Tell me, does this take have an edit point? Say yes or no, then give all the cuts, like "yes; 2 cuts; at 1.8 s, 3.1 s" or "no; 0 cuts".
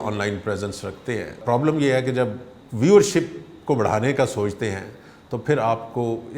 yes; 2 cuts; at 1.4 s, 2.5 s